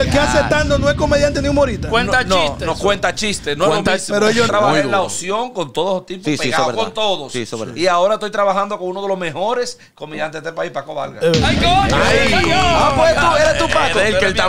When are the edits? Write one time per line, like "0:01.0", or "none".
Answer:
0:04.5